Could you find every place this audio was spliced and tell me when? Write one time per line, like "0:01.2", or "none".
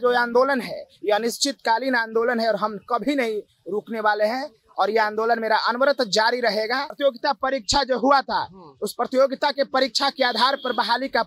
0:07.0